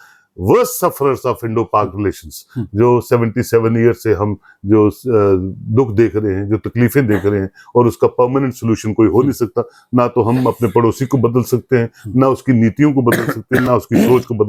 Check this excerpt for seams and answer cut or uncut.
uncut